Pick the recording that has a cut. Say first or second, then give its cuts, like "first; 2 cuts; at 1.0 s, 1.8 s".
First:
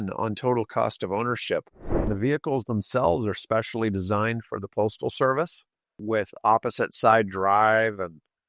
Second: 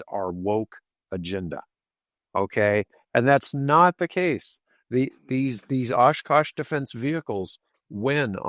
first; 2 cuts; at 2.1 s, 5.9 s